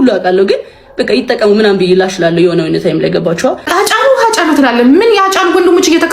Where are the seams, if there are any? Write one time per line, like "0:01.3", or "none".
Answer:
0:02.9
0:03.6